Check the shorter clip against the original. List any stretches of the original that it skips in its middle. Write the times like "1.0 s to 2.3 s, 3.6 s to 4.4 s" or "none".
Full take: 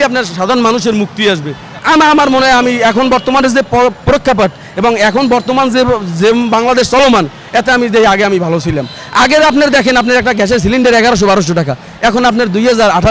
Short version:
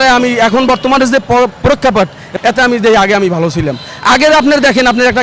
4.7 s to 7.4 s